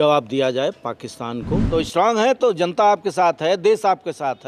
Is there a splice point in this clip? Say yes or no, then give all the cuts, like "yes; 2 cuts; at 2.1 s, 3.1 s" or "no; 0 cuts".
yes; 1 cut; at 1.6 s